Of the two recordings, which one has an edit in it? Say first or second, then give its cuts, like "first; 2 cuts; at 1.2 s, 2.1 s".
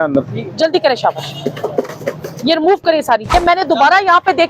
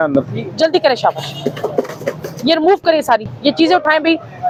first; 1 cut; at 3.3 s